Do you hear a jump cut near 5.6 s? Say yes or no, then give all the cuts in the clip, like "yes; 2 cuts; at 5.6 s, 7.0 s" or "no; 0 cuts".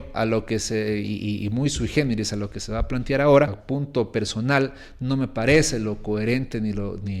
no; 1 cut; at 3.7 s